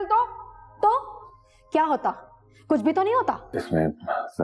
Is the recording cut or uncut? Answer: cut